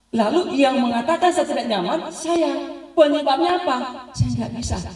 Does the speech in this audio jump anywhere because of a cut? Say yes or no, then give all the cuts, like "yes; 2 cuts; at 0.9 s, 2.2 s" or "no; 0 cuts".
no; 0 cuts